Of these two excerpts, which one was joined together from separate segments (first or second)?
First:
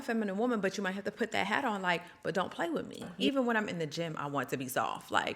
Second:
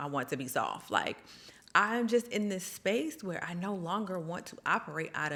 first